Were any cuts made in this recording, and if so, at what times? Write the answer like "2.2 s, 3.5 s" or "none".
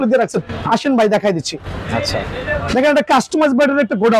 none

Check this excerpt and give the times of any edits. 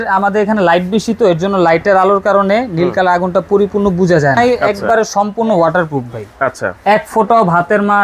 4.4 s

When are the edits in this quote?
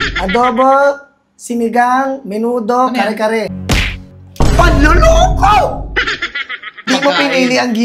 3.6 s, 6.9 s

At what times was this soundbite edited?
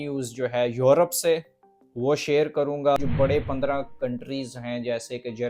3.0 s

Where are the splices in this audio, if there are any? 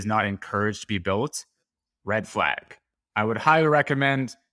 none

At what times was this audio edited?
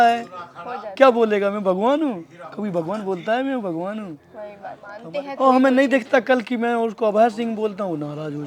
4.9 s

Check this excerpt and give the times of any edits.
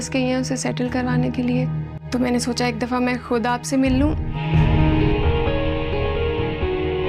4.3 s

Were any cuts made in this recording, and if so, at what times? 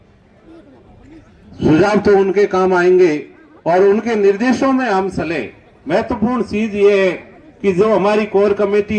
none

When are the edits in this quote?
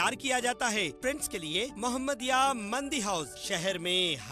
1.0 s

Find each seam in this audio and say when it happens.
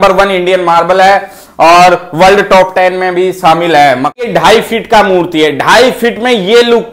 4.2 s

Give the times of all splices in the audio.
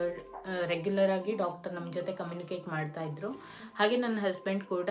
none

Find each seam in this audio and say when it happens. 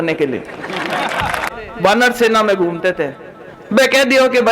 1.6 s

